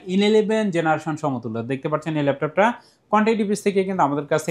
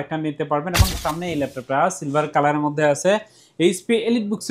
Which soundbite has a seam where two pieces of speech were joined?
second; 1 cut; at 1.0 s

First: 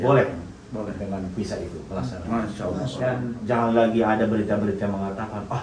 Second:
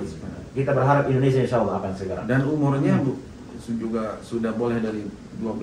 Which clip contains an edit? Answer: first; 1 cut; at 3.1 s

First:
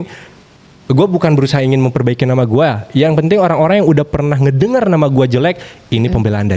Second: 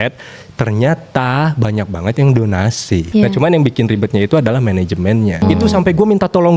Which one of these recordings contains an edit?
second; 2 cuts; at 3.1 s, 5.4 s

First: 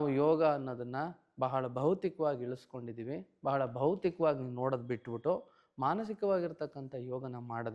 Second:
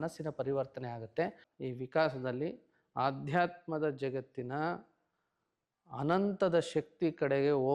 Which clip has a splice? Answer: second; 1 cut; at 1.4 s

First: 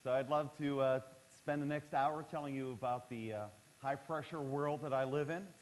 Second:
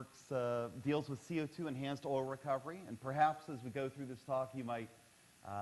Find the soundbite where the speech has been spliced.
first; 1 cut; at 1.7 s

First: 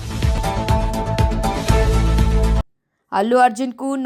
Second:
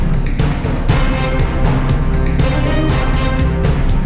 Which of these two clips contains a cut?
first; 1 cut; at 2.6 s

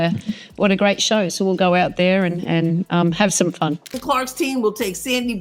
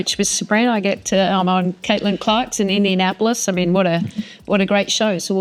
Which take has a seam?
first; 1 cut; at 3.9 s

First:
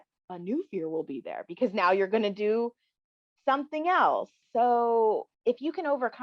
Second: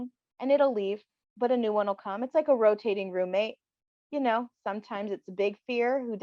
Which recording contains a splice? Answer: first; 2 cuts; at 4.4 s, 5.3 s

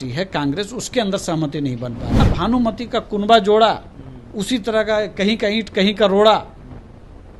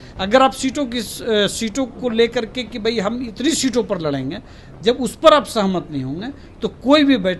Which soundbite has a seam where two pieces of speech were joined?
first; 1 cut; at 2.2 s

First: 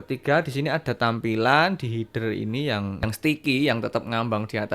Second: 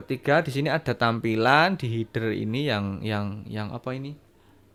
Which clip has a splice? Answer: first; 1 cut; at 3.0 s

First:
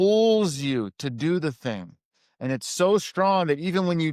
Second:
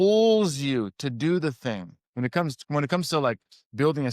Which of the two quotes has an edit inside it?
second; 1 cut; at 2.0 s

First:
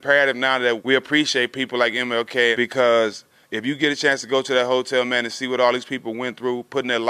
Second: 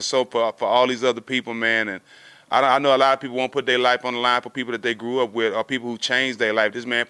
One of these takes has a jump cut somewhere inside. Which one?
first; 2 cuts; at 0.8 s, 2.6 s

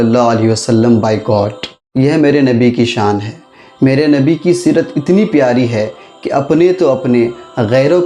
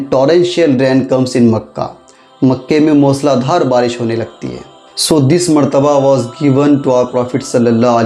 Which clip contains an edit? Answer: first; 1 cut; at 1.8 s

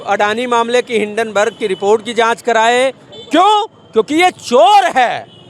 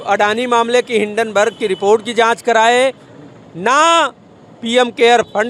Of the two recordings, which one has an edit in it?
first; 1 cut; at 3.1 s

